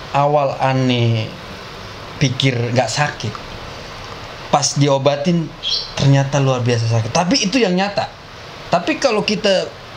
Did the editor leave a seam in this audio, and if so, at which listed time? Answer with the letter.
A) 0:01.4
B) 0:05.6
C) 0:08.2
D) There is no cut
D